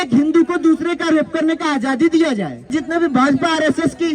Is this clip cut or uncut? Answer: cut